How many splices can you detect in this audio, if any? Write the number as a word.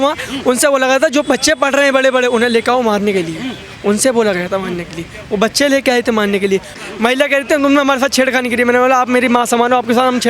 one